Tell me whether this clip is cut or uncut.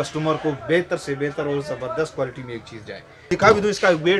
cut